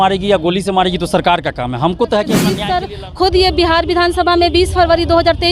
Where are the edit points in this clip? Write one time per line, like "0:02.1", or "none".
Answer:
0:02.7